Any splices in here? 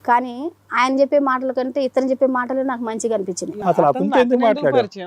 yes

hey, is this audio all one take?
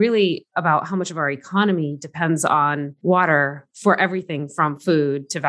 no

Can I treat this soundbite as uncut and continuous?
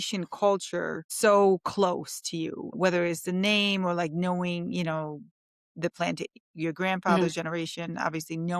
no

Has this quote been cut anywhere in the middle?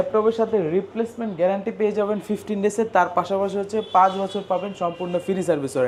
no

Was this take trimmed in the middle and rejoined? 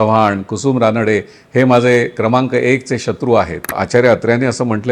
yes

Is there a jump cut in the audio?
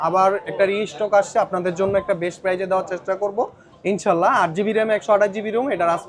no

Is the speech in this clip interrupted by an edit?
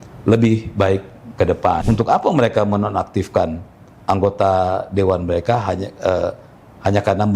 yes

